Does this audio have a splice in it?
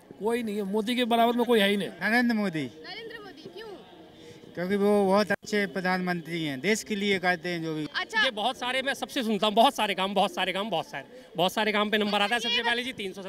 yes; 2 cuts; at 2.0 s, 7.9 s

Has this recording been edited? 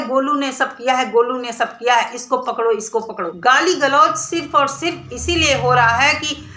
yes; 1 cut; at 3.3 s

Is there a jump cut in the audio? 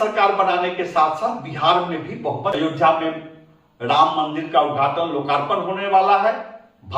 yes; 1 cut; at 2.6 s

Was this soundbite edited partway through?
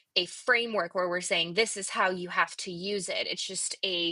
no; 0 cuts

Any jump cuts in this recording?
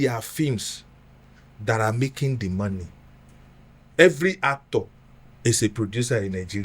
yes; 1 cut; at 3.9 s

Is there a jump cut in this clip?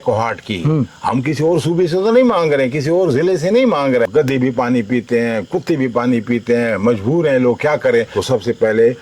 yes; 2 cuts; at 4.1 s, 8.1 s

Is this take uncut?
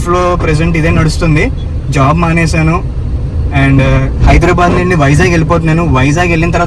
yes; 0 cuts

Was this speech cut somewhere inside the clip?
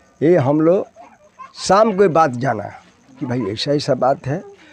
no; 0 cuts

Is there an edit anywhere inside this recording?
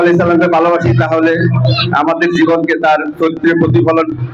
no; 0 cuts

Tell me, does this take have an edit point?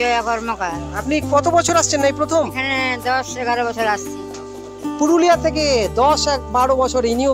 no; 0 cuts

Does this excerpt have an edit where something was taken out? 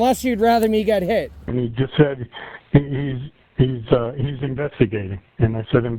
yes; 1 cut; at 1.4 s

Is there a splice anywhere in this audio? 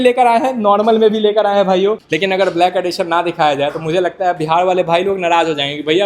yes; 1 cut; at 2.1 s

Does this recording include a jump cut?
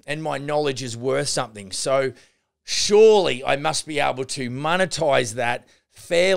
no; 0 cuts

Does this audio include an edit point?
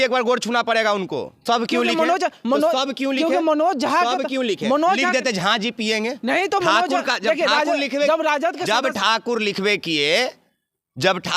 yes; 1 cut; at 1.4 s

